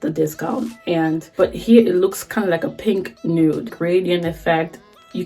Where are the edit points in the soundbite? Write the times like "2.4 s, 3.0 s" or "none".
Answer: 1.3 s, 3.7 s